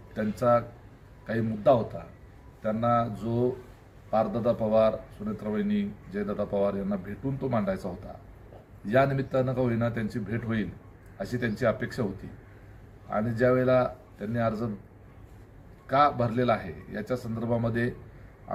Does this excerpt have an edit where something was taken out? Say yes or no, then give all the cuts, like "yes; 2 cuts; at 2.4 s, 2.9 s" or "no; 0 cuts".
no; 0 cuts